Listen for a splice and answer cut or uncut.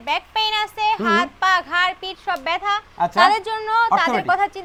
uncut